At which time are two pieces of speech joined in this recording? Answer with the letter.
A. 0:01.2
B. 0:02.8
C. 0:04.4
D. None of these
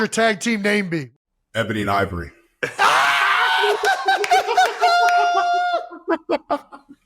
A